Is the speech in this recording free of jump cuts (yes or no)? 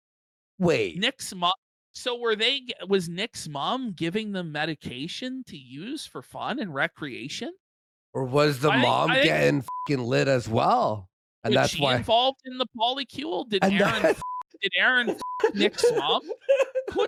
yes